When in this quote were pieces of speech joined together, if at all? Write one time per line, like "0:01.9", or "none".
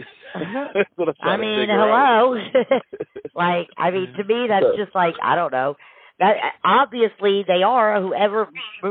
none